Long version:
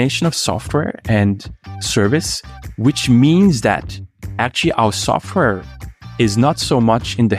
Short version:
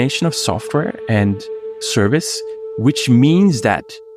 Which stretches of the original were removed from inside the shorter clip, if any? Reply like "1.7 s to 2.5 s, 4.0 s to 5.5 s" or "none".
none